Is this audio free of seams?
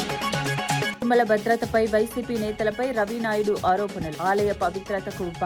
no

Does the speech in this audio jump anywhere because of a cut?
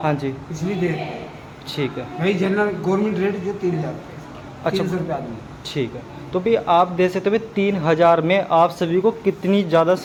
no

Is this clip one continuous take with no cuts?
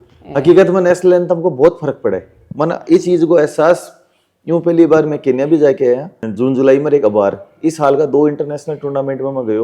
yes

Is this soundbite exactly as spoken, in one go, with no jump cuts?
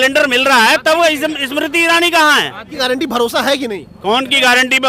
no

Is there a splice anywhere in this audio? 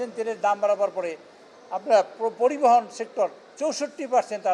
no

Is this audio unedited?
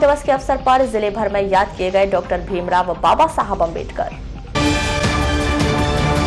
yes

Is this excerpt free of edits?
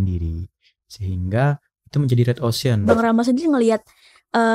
no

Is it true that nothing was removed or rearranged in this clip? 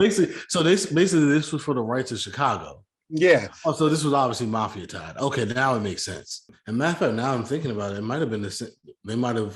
no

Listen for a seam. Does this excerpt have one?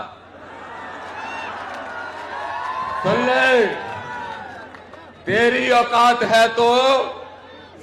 no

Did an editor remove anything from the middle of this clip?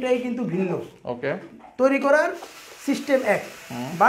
no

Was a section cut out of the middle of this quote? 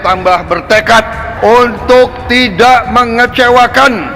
yes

